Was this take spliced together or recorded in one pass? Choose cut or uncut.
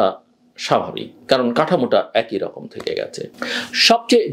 cut